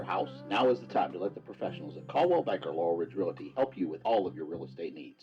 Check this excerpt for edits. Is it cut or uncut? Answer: uncut